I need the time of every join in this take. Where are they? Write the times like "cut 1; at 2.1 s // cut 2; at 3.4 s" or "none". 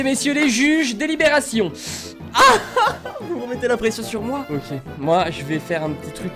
cut 1; at 1.7 s // cut 2; at 4.5 s